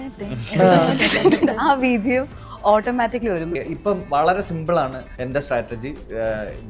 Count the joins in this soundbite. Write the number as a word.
two